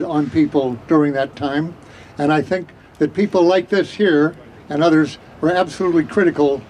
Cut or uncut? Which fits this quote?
uncut